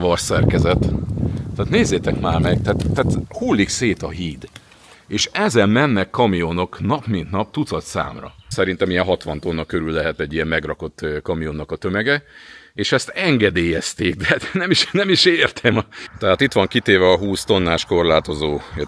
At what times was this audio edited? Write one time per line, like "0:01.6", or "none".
0:08.5
0:16.0